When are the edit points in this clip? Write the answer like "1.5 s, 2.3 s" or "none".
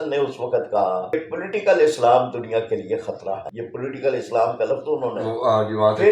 1.1 s, 3.5 s